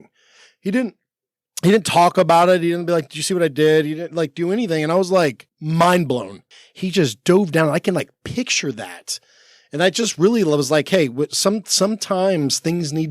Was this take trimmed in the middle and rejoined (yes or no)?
yes